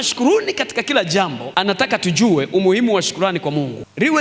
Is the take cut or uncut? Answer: uncut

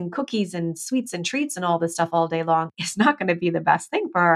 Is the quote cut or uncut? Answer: cut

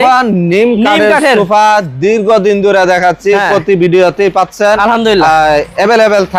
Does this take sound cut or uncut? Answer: uncut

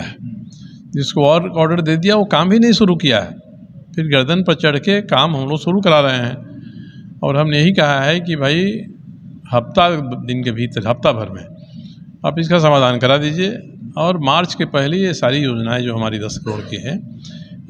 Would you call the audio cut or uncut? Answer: uncut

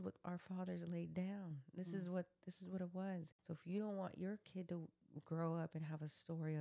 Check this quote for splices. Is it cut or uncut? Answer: cut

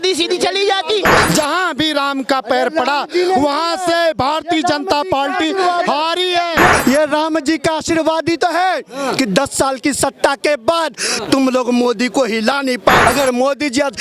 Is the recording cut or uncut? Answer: cut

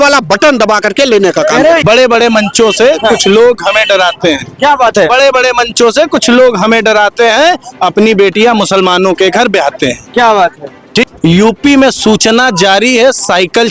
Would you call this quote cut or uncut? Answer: cut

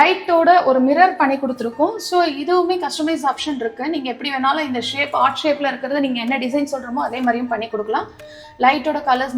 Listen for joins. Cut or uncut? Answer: uncut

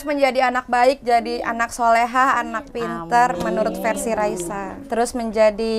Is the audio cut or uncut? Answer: uncut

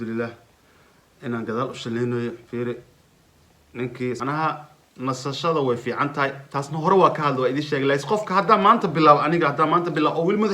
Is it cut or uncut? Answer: cut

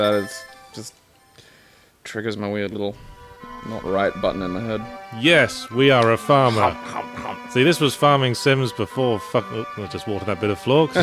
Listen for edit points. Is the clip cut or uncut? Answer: cut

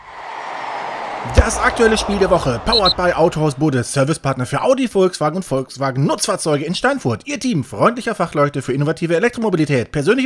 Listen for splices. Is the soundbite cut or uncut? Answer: cut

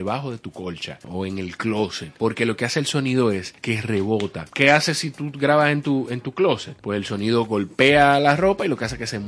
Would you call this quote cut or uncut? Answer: cut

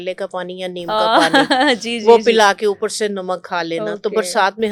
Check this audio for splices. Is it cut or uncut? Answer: uncut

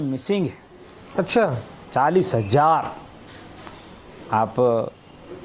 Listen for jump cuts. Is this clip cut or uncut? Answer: uncut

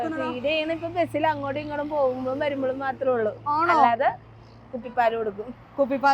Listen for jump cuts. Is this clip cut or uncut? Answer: uncut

